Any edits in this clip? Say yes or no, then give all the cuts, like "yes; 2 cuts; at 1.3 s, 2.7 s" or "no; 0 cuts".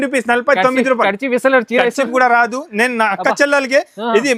no; 0 cuts